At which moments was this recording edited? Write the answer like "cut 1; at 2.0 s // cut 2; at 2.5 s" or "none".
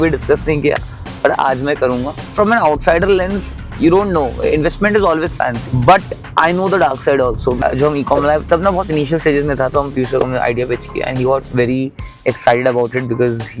cut 1; at 2.2 s // cut 2; at 5.6 s // cut 3; at 7.6 s